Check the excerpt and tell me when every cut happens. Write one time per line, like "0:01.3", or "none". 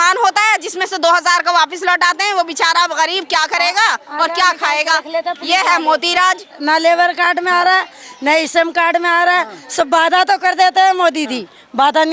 0:06.5